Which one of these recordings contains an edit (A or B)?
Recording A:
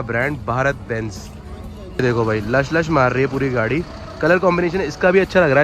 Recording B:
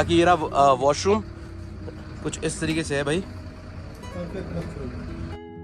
A